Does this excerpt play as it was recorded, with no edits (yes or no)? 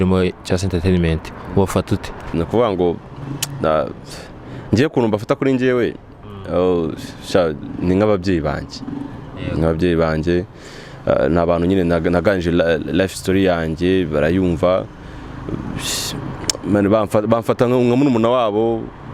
no